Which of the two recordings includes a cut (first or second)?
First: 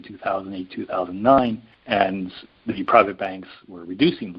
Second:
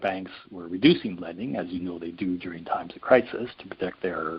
first